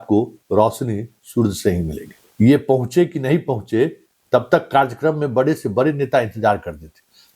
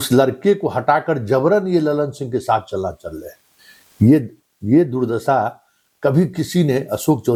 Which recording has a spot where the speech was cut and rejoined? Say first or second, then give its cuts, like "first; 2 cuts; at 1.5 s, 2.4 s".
first; 1 cut; at 2.2 s